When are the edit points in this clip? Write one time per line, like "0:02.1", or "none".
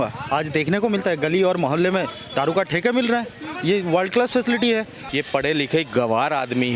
0:05.0